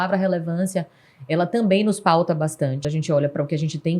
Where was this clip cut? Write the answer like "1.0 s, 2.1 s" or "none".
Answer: 2.8 s

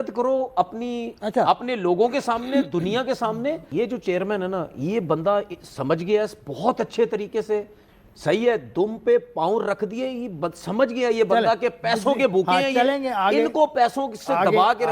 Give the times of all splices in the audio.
3.6 s, 7.8 s

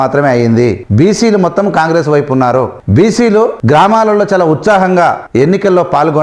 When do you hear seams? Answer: 0.8 s, 2.8 s, 3.6 s, 5.2 s

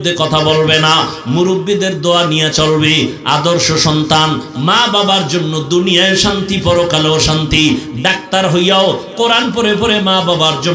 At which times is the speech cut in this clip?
none

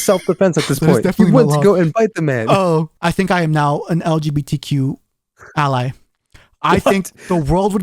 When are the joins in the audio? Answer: 2.9 s

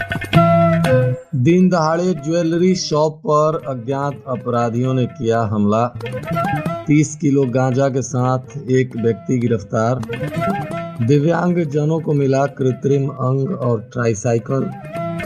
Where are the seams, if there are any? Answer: 1.2 s

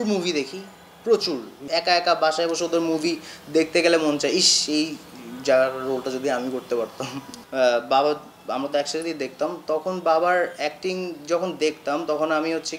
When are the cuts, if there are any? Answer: 1.6 s, 7.4 s

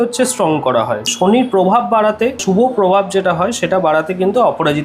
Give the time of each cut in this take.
1.1 s, 2.4 s

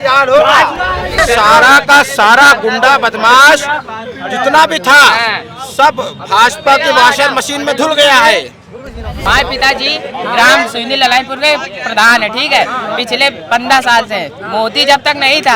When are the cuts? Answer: 1.2 s, 9.2 s

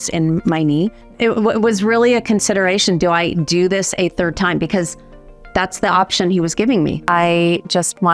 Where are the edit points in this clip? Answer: 1.0 s, 7.0 s

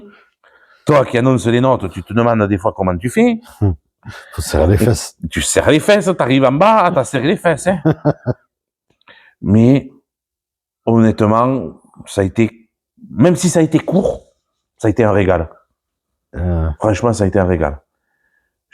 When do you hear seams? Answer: 16.0 s

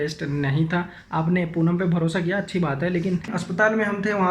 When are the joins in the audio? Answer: 1.0 s, 3.4 s

